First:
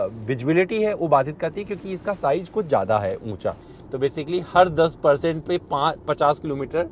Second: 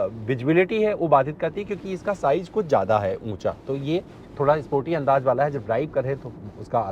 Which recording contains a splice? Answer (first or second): first